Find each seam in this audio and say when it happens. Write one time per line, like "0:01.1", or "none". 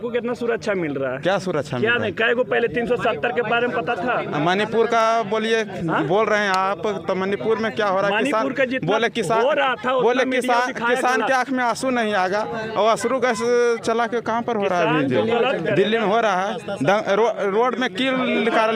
none